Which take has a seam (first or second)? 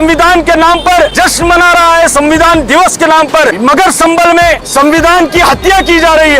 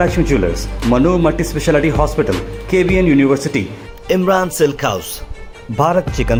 first